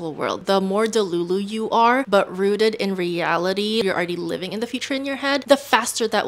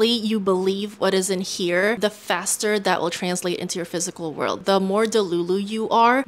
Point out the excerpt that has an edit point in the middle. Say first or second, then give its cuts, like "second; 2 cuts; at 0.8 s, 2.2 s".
first; 1 cut; at 3.8 s